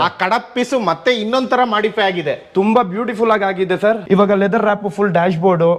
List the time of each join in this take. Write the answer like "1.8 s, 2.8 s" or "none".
4.0 s